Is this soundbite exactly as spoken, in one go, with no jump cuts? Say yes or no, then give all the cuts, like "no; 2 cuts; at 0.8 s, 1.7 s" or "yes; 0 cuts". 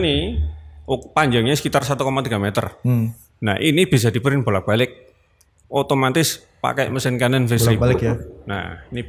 yes; 0 cuts